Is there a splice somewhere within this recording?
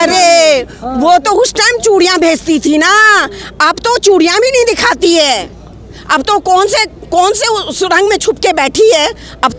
no; 0 cuts

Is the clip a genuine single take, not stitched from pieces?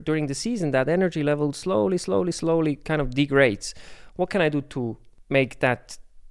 no; 1 cut; at 5.1 s

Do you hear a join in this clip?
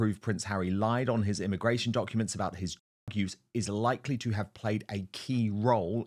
no; 0 cuts

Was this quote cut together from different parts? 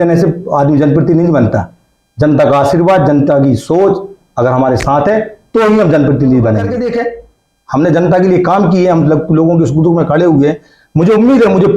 yes; 1 cut; at 6.8 s

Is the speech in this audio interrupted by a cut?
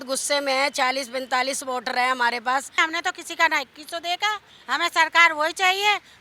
yes; 2 cuts; at 2.8 s, 4.5 s

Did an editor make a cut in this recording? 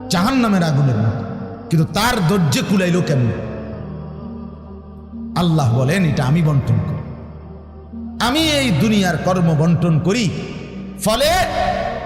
no; 0 cuts

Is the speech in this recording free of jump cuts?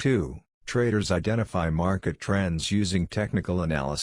no; 1 cut; at 1.0 s

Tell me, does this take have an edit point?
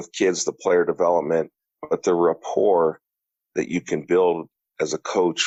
no; 0 cuts

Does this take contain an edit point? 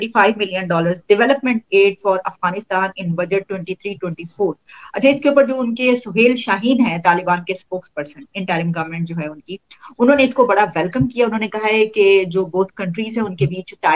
no; 0 cuts

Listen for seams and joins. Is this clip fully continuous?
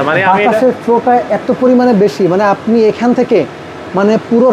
yes; 0 cuts

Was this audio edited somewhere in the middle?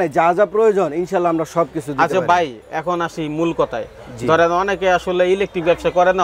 no; 0 cuts

